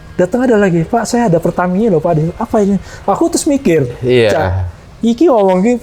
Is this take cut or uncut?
uncut